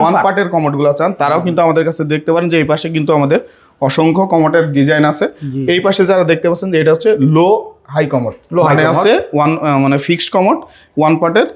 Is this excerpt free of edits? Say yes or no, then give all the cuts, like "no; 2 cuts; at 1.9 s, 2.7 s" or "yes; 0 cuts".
yes; 0 cuts